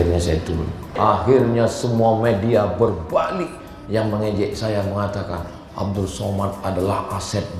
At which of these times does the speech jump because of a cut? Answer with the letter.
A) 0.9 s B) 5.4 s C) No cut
A